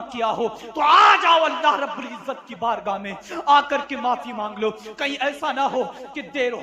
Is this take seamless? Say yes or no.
yes